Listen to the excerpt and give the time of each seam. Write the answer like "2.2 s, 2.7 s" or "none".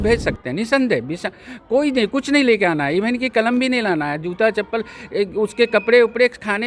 none